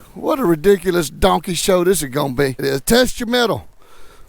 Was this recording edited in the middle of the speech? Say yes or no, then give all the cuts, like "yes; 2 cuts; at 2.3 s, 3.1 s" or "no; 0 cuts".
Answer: yes; 1 cut; at 2.6 s